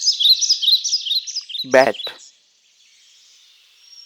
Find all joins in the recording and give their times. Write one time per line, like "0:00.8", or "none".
0:01.2
0:02.4